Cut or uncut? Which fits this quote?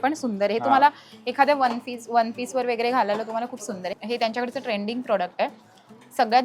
cut